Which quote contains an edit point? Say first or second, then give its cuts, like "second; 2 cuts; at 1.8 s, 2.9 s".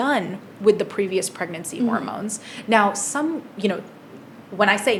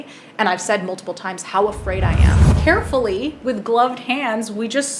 second; 1 cut; at 2.4 s